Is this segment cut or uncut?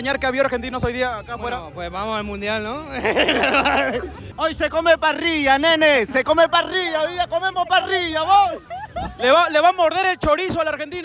cut